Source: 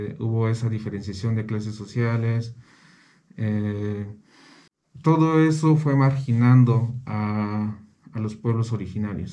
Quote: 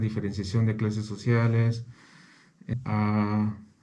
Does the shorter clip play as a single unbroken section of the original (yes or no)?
no